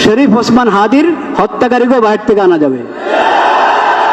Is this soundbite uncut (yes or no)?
yes